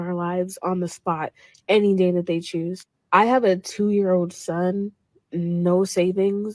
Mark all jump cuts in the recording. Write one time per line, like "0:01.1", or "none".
none